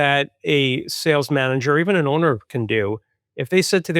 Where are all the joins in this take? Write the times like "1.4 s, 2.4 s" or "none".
none